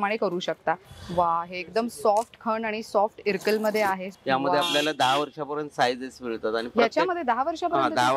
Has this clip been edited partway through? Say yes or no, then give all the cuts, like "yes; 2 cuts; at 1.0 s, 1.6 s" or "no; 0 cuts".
yes; 2 cuts; at 0.9 s, 4.1 s